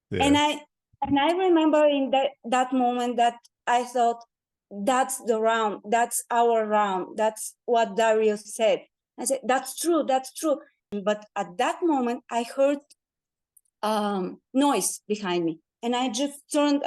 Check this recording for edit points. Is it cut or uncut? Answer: cut